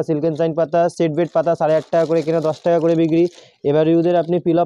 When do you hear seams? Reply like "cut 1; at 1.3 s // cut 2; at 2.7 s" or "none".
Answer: none